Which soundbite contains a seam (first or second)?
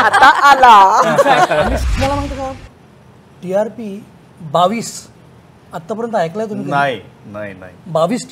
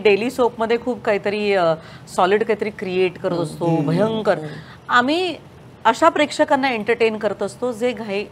first